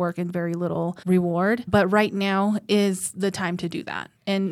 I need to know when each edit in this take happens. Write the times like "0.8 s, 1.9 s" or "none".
1.0 s, 1.7 s